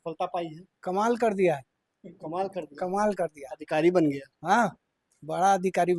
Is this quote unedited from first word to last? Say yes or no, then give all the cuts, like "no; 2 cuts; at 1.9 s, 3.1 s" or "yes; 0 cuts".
yes; 0 cuts